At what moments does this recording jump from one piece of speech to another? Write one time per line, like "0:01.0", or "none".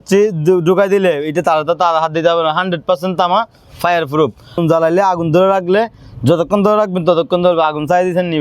0:04.6